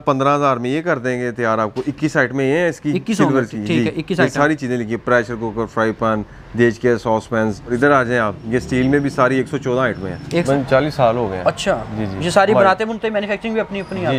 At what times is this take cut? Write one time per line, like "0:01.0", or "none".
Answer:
0:07.7
0:10.4